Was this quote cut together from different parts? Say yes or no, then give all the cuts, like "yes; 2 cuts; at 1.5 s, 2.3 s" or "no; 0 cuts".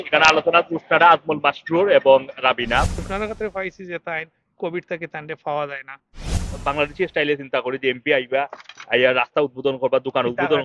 yes; 2 cuts; at 3.0 s, 6.6 s